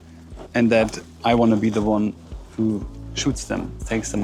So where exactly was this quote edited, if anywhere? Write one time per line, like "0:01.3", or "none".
none